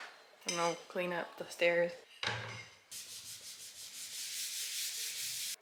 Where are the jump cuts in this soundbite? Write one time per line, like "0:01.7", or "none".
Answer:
none